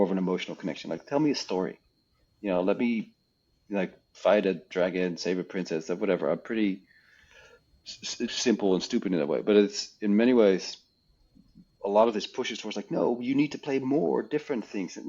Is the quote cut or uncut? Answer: cut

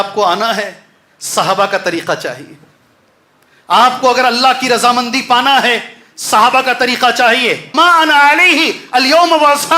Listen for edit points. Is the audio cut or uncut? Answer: cut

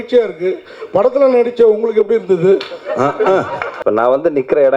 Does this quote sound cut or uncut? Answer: cut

